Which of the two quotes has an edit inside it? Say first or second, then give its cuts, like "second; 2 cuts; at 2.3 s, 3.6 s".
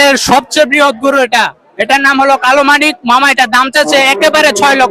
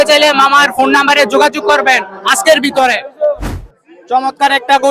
second; 1 cut; at 3.5 s